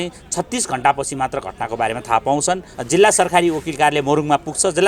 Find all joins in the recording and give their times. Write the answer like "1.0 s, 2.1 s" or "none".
2.7 s